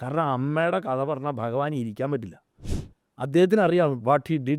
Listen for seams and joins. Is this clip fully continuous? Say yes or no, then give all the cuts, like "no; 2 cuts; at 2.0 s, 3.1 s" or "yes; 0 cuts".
yes; 0 cuts